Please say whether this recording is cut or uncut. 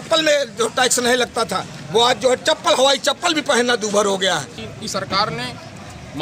cut